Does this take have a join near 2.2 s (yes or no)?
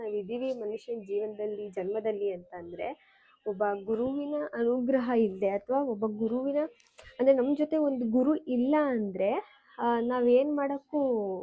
no